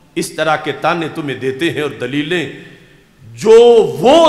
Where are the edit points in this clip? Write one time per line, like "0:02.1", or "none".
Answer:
none